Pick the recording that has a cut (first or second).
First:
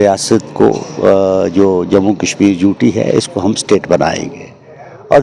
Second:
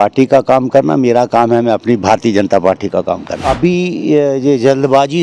second